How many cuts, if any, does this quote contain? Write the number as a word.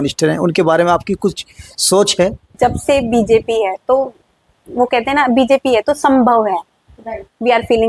one